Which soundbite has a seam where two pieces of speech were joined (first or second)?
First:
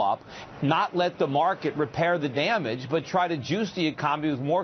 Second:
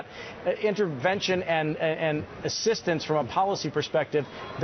first